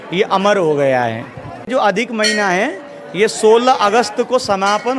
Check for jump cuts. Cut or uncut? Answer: cut